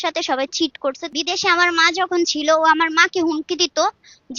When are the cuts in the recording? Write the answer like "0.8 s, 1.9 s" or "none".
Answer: 1.1 s